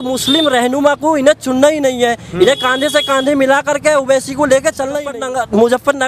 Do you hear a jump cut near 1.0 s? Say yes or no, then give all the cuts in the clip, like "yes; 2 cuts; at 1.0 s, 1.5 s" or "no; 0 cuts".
no; 1 cut; at 5.1 s